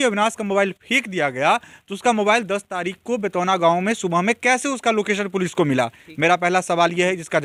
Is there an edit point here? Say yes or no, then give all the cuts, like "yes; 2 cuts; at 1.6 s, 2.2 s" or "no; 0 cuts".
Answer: no; 0 cuts